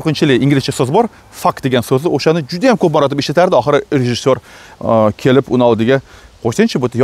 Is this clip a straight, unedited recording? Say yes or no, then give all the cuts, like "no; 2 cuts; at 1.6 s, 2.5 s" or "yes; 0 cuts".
yes; 0 cuts